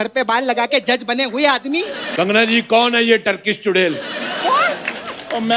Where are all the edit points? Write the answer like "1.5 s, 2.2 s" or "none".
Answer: 2.0 s